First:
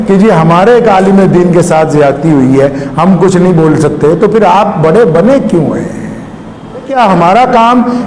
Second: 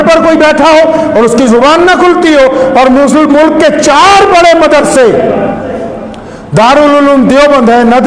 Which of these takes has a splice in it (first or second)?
first